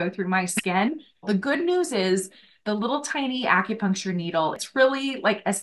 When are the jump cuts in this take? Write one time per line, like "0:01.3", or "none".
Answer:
0:01.2
0:04.6